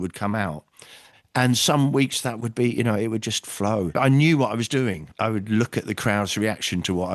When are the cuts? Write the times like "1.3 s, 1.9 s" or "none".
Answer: 3.9 s, 5.1 s

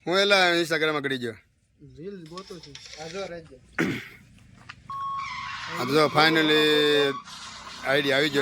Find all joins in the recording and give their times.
none

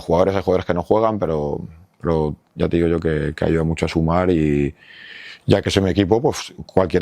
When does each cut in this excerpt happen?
none

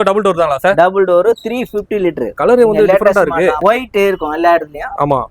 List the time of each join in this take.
2.4 s, 3.6 s

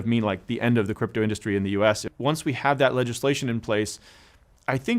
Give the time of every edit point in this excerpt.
2.1 s

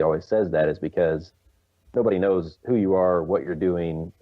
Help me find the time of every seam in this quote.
2.5 s

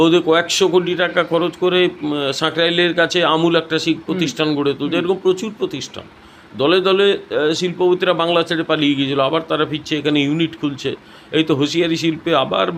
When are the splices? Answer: none

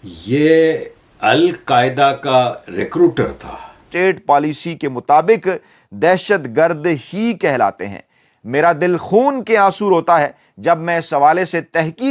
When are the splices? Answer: 3.8 s, 9.4 s

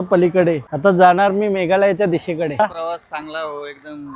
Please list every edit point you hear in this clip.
2.6 s

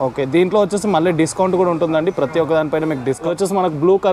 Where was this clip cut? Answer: 3.2 s

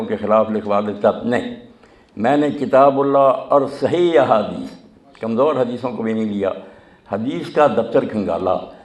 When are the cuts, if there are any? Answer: none

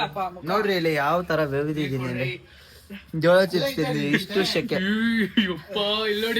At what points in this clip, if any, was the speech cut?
3.6 s

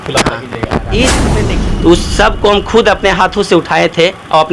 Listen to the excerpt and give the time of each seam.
1.2 s

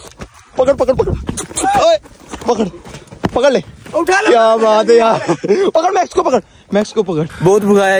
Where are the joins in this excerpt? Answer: none

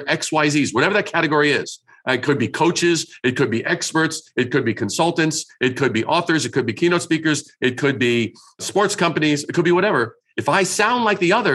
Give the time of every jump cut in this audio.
none

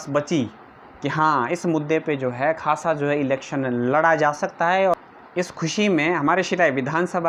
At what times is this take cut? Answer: 4.9 s

